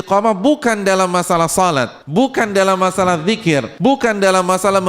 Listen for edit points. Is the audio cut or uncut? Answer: cut